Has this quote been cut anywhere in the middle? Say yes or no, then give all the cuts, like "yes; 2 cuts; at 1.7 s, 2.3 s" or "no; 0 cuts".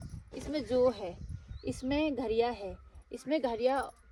no; 0 cuts